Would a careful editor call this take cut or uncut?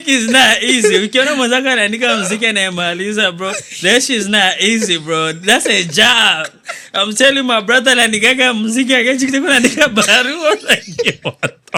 uncut